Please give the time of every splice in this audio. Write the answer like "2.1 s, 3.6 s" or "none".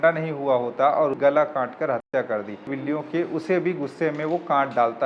1.2 s, 2.7 s

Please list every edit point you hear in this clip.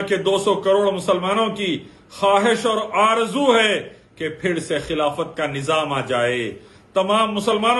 none

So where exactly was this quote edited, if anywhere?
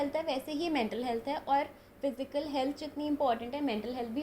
none

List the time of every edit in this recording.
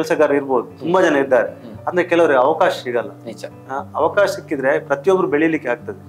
none

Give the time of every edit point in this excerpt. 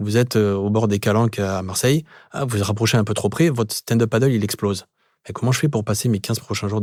none

